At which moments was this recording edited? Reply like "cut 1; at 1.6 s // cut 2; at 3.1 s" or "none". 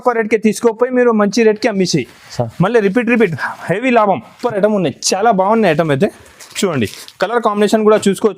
cut 1; at 4.3 s